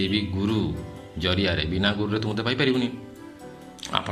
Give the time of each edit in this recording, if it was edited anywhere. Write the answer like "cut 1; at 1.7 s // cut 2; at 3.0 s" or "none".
none

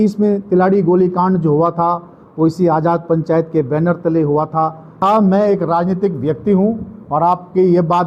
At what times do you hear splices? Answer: cut 1; at 5.0 s

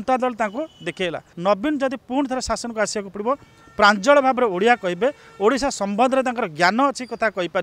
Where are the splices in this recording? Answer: cut 1; at 1.3 s

